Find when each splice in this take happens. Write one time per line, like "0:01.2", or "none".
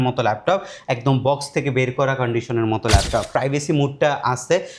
0:03.3

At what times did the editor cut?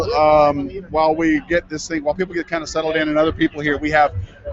0:02.7

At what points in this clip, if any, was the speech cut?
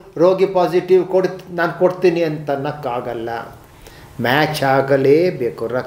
none

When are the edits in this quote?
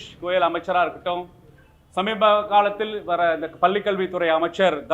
none

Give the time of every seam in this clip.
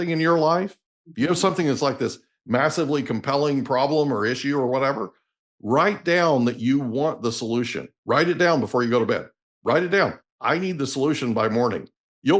none

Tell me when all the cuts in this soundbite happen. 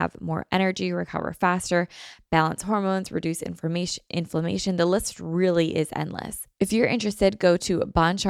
0:06.4

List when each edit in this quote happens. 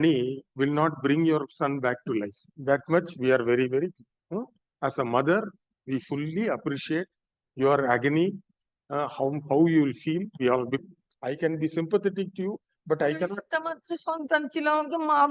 0:10.8

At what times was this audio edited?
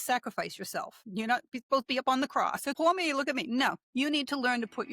0:01.0
0:02.8
0:03.8

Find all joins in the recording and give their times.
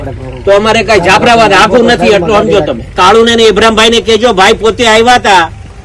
0:03.0

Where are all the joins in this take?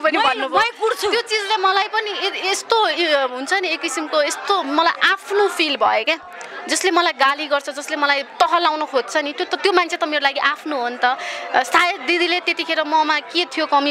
none

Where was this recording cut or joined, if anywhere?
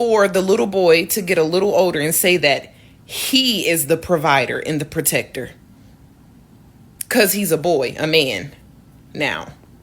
0:05.6
0:06.9

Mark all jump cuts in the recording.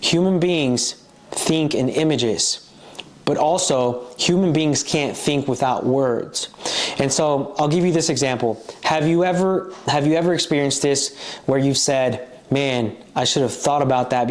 none

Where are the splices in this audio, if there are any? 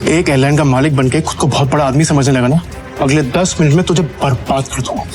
0:02.8

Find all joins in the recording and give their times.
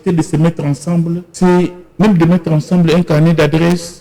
0:01.3
0:01.8

